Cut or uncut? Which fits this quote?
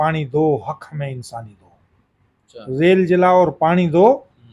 uncut